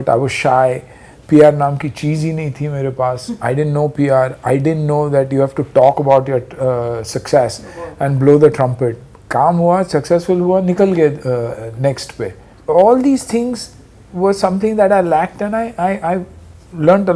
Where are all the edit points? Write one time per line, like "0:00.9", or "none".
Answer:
none